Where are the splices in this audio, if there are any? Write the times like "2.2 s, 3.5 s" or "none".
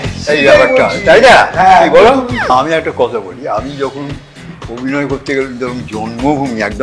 2.5 s